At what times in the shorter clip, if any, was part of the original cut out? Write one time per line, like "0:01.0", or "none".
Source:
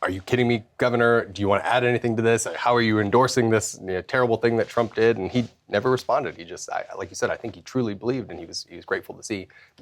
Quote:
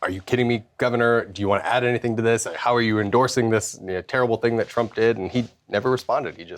none